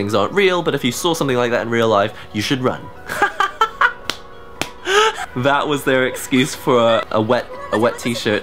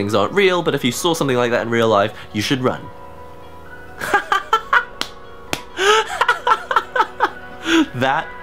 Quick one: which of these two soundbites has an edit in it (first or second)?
first